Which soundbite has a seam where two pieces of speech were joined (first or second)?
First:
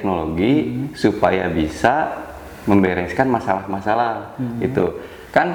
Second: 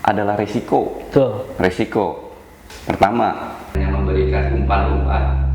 second